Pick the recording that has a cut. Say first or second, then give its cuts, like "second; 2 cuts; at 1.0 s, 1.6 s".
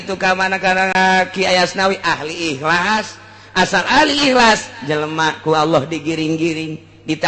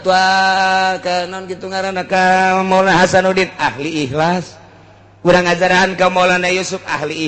first; 1 cut; at 0.9 s